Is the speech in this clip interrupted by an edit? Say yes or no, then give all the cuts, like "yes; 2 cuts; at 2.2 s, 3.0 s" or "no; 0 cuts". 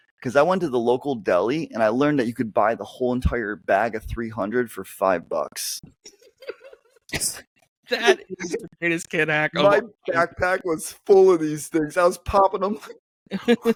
no; 0 cuts